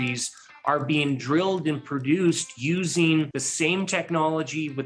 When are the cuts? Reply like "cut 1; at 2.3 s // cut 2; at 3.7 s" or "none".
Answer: cut 1; at 3.4 s